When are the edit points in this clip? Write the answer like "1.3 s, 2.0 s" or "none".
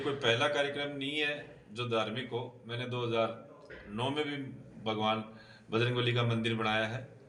none